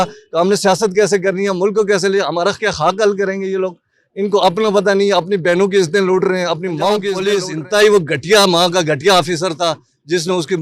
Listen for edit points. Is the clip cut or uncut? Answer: cut